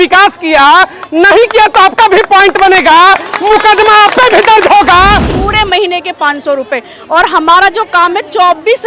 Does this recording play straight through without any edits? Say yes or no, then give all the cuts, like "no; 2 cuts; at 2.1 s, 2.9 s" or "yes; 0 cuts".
no; 1 cut; at 5.3 s